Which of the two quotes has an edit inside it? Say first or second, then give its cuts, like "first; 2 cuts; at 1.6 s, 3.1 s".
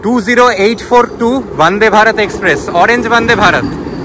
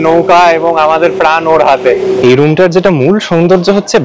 second; 1 cut; at 2.2 s